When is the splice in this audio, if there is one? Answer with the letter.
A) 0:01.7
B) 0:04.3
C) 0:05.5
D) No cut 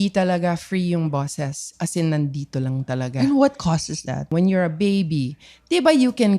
B